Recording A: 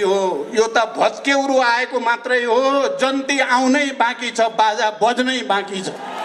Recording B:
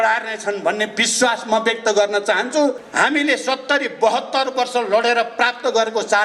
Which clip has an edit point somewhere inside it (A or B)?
B